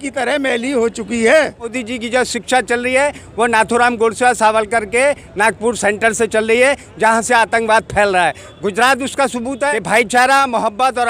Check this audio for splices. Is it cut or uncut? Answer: cut